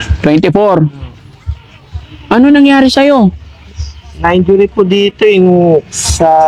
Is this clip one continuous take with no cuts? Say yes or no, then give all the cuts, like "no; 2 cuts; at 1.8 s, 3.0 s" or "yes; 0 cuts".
yes; 0 cuts